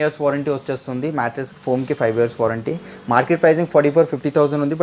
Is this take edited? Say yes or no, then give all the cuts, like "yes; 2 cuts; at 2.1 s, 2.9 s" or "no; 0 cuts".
no; 0 cuts